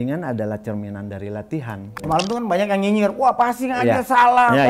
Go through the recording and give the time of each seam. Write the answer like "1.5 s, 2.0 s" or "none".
2.0 s